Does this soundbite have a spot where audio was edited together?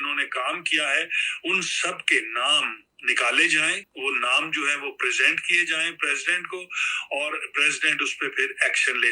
no; 0 cuts

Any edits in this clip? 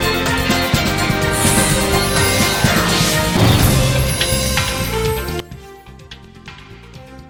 no; 0 cuts

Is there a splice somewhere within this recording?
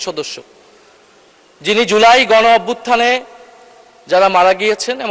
no; 0 cuts

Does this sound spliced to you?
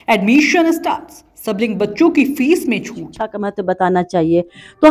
yes; 1 cut; at 3.4 s

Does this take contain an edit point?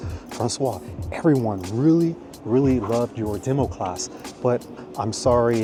no; 0 cuts

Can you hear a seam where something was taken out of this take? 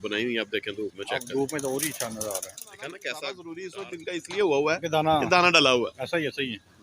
yes; 1 cut; at 3.5 s

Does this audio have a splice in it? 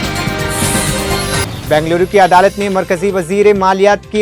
yes; 1 cut; at 1.5 s

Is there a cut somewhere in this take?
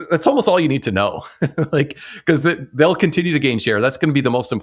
no; 0 cuts

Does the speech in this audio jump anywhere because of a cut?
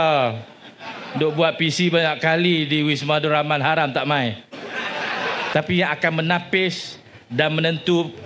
yes; 1 cut; at 5.4 s

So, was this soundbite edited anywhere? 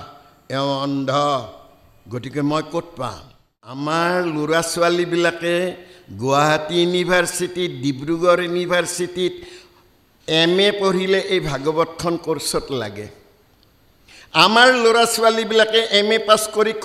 yes; 1 cut; at 3.8 s

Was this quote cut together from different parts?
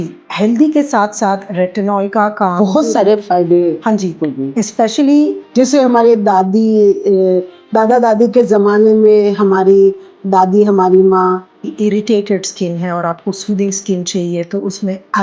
yes; 2 cuts; at 5.4 s, 11.6 s

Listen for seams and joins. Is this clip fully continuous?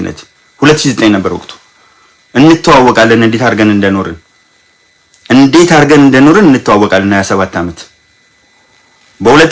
yes; 0 cuts

